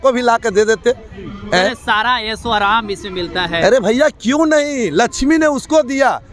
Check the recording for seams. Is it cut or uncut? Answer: uncut